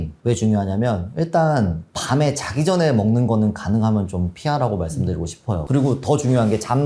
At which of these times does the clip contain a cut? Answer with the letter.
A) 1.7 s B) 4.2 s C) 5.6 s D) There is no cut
C